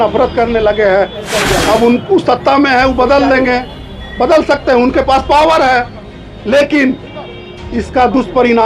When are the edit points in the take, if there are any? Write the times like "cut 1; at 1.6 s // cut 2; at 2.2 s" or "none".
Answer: cut 1; at 1.3 s